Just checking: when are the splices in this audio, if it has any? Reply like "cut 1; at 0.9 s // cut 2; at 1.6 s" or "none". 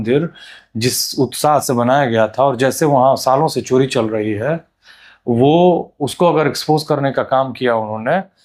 none